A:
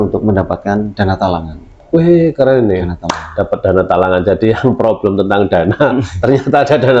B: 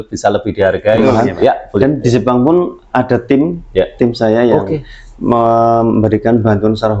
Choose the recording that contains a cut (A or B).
B